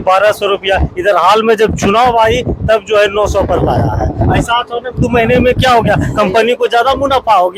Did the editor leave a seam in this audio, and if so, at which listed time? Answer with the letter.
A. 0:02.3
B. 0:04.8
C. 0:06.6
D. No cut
D